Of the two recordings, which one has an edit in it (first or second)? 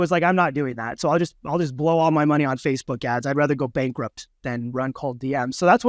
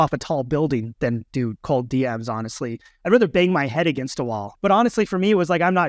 second